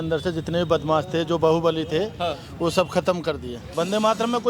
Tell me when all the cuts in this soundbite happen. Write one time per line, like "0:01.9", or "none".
0:03.6